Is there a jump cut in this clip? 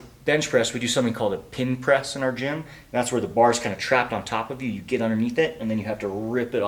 no; 0 cuts

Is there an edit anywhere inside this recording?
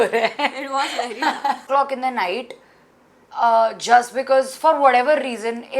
yes; 1 cut; at 1.7 s

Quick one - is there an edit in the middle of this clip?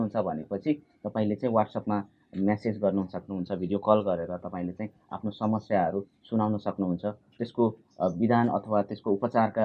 no; 0 cuts

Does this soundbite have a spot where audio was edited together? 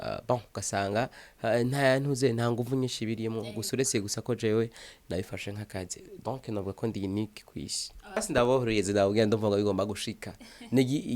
yes; 1 cut; at 8.2 s

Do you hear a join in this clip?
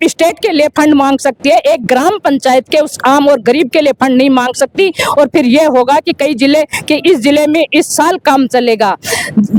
no; 0 cuts

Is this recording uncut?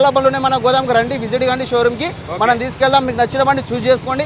yes; 0 cuts

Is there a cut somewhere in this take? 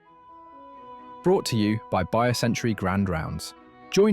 yes; 1 cut; at 1.2 s

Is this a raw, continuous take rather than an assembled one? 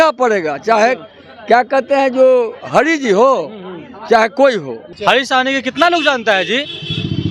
no; 1 cut; at 4.8 s

